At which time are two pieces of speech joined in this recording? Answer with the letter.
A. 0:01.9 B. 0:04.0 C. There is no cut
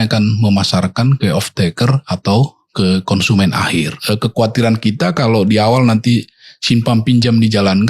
B